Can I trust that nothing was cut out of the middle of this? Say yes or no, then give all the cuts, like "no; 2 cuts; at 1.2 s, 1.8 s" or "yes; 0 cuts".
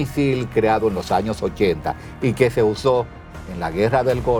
yes; 0 cuts